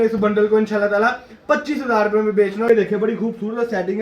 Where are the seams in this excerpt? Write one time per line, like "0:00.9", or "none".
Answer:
0:02.7